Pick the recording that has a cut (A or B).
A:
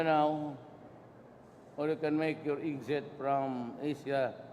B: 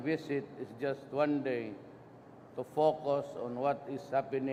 A